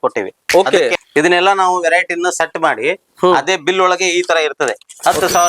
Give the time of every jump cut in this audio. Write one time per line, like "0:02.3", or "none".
0:01.0